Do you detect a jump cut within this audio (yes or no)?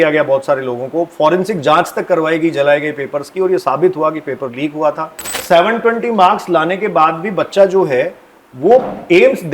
yes